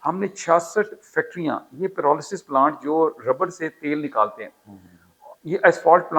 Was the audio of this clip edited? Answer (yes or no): no